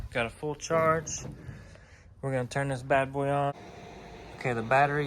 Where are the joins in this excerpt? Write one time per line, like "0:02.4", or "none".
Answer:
0:03.5